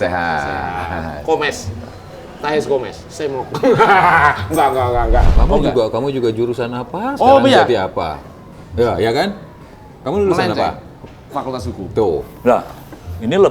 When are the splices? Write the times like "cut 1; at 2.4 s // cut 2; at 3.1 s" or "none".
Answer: cut 1; at 3.0 s // cut 2; at 5.3 s